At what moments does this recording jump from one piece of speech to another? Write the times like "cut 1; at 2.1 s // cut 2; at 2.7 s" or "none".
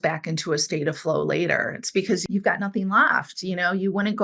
cut 1; at 2.2 s